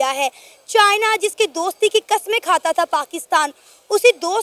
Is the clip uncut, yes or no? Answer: yes